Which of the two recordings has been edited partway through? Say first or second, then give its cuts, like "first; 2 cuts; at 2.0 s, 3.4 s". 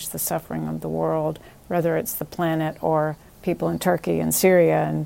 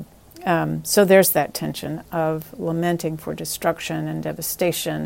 first; 1 cut; at 3.3 s